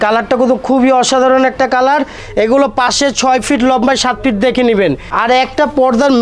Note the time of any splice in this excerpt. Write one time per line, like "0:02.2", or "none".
0:02.2
0:05.1